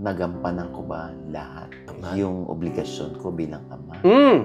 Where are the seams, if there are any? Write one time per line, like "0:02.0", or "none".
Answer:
none